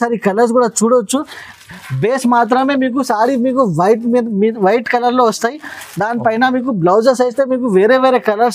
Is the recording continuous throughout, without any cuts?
yes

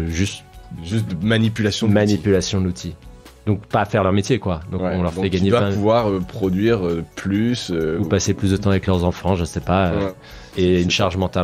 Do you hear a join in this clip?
yes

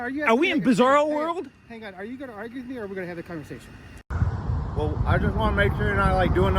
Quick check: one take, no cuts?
no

